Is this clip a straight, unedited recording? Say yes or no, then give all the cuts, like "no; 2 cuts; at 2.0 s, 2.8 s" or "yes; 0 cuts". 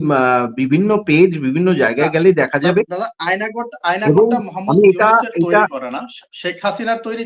yes; 0 cuts